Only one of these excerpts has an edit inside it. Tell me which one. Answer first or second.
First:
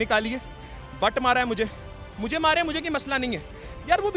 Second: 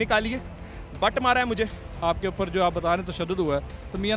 second